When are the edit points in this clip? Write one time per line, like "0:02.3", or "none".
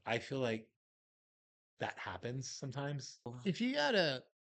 0:03.3